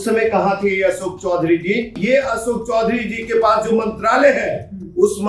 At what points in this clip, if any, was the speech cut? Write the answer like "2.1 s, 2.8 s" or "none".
2.0 s